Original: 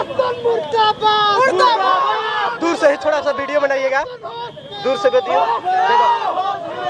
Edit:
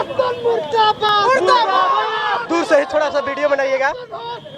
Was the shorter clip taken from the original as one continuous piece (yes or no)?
no